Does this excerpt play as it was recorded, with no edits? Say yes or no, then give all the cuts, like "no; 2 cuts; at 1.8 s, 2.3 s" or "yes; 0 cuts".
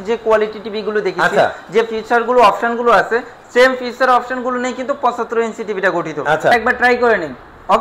no; 1 cut; at 6.5 s